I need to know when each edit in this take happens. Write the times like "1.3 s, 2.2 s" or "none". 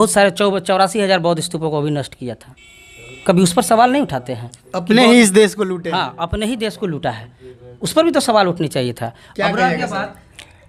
none